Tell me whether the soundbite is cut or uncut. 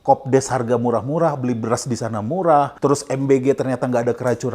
cut